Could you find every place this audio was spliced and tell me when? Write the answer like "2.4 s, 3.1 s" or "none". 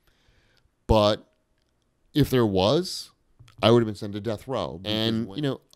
4.8 s